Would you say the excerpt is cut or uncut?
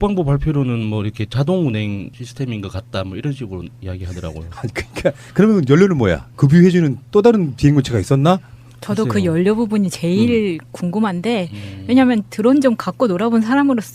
cut